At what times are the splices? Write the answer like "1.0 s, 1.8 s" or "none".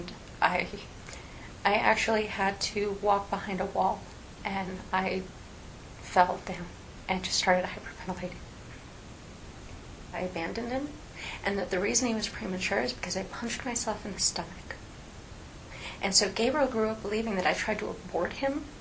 1.0 s, 10.2 s